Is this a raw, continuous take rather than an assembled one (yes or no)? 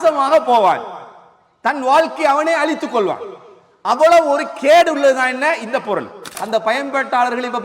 no